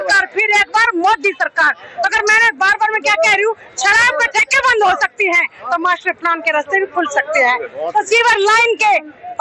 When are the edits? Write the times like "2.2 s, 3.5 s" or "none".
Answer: none